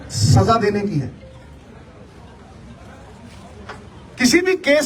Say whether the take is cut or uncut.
uncut